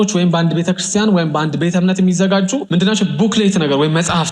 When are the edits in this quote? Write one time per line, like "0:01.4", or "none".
0:02.7